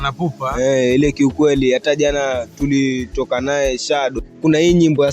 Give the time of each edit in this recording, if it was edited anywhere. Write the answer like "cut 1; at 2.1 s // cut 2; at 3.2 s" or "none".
cut 1; at 4.2 s